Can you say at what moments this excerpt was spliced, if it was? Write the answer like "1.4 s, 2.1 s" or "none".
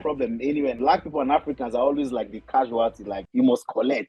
0.8 s, 3.2 s